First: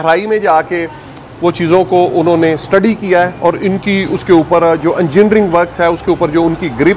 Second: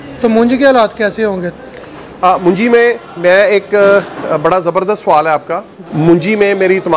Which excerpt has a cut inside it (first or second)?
second